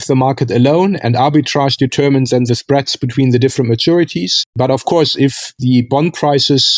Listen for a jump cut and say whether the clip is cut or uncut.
uncut